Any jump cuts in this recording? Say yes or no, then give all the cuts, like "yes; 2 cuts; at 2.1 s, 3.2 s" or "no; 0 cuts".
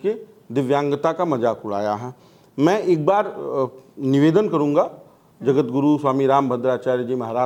no; 0 cuts